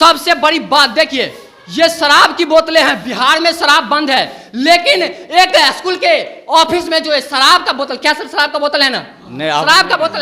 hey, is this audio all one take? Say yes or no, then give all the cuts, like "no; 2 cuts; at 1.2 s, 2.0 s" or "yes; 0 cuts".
yes; 0 cuts